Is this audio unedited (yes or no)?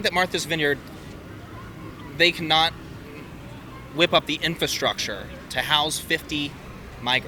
yes